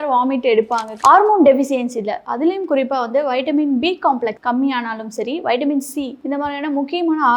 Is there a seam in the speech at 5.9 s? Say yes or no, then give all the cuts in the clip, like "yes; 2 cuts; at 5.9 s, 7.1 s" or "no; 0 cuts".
no; 1 cut; at 0.9 s